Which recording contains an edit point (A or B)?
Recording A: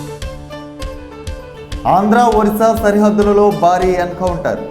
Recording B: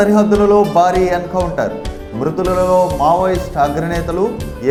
A